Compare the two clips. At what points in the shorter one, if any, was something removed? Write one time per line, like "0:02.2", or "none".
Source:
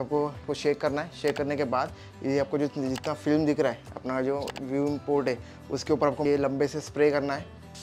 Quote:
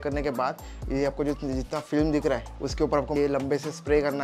0:02.5